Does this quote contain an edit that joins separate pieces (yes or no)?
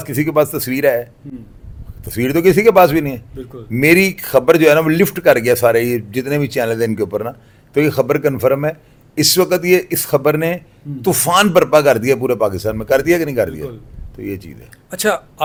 no